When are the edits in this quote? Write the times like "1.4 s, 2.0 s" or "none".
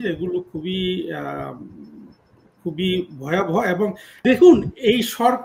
4.1 s